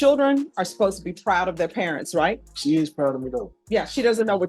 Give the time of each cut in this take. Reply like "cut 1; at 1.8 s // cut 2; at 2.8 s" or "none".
cut 1; at 2.5 s // cut 2; at 3.5 s